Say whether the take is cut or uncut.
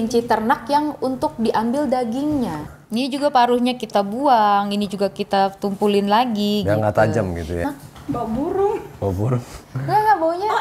cut